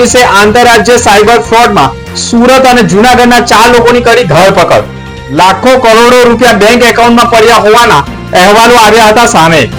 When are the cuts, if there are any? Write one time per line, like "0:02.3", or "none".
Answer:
none